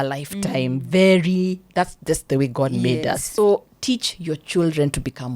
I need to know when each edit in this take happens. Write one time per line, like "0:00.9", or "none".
0:03.3